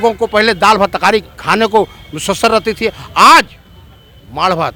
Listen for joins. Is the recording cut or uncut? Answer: uncut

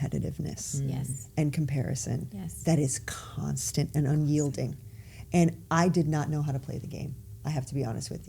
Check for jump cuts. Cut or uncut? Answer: uncut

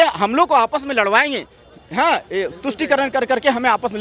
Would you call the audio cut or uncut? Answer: uncut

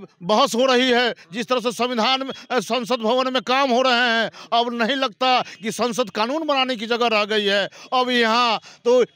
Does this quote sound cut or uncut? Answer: uncut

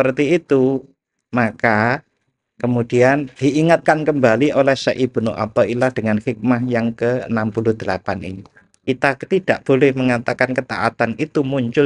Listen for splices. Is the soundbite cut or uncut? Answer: cut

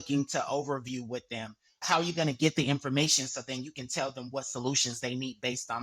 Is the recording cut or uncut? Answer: cut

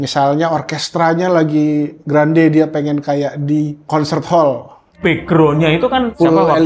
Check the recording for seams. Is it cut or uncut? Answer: cut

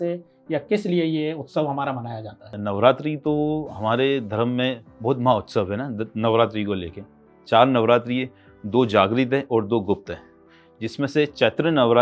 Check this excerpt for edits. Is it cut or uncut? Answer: cut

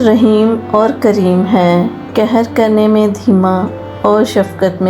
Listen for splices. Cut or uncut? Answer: uncut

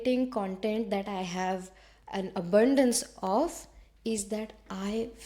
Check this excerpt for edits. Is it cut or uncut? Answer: uncut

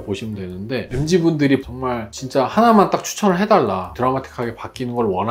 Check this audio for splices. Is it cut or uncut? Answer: cut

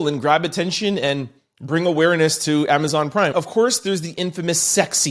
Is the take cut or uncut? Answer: cut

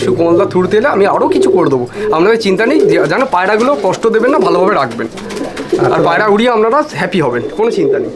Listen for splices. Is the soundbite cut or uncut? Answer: uncut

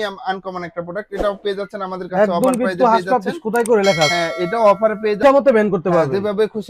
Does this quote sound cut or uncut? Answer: cut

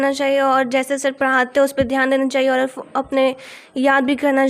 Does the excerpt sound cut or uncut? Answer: uncut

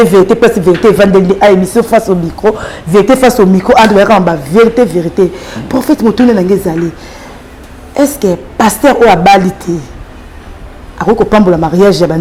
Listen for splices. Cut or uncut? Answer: uncut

